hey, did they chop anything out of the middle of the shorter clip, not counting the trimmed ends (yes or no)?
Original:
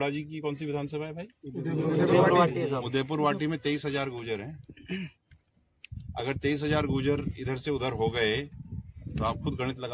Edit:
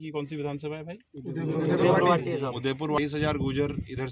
yes